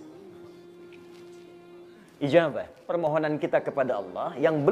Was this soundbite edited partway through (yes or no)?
yes